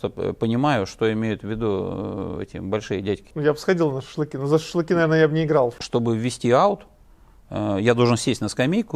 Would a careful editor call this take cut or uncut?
cut